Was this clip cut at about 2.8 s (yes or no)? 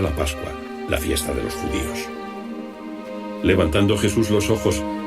yes